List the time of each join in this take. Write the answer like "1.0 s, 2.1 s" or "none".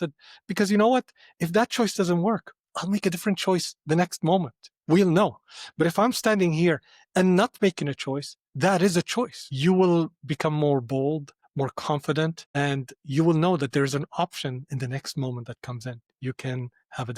9.5 s, 11.4 s, 12.4 s, 16.1 s